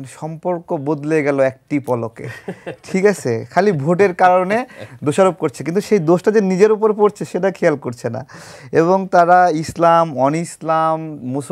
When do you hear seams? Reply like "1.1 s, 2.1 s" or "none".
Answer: none

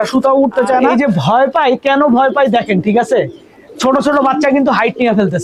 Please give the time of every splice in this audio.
0.9 s

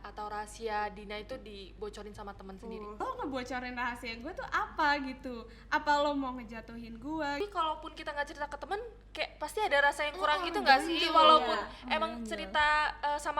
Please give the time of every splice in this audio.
3.0 s, 7.4 s

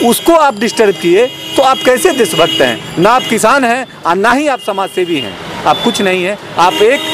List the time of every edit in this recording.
none

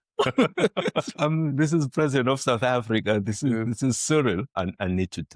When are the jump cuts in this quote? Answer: 1.1 s, 4.5 s

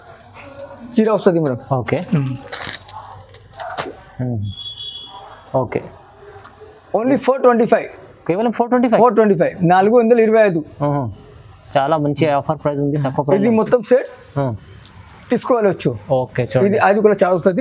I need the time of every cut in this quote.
none

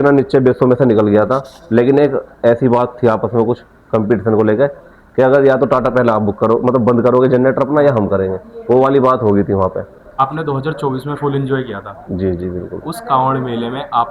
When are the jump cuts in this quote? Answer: 10.0 s

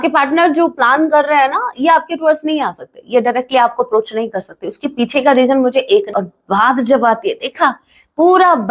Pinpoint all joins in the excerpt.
6.1 s

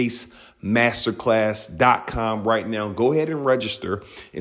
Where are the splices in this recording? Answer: none

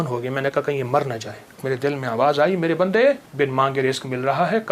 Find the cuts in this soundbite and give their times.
1.6 s, 3.3 s

